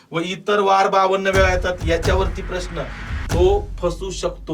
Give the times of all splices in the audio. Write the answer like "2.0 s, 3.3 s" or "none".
3.0 s